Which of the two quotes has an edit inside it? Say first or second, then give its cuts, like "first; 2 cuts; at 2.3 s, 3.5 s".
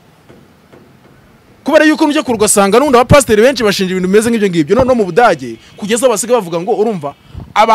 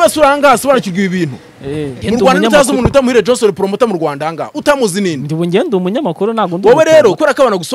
second; 1 cut; at 1.9 s